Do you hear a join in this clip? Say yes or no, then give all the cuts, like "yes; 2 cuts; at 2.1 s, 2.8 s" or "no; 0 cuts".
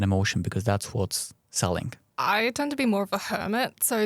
yes; 1 cut; at 2.0 s